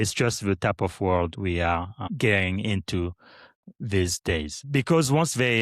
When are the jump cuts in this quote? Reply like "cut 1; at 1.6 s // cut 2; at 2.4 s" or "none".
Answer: cut 1; at 2.0 s // cut 2; at 4.6 s